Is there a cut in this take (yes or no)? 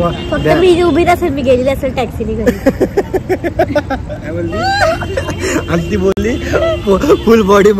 no